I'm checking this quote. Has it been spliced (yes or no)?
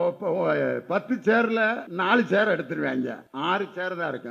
yes